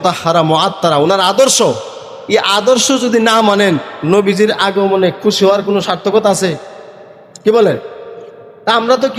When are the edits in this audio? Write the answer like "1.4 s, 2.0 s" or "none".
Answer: none